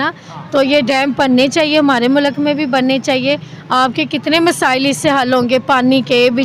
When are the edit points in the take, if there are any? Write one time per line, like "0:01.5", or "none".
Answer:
none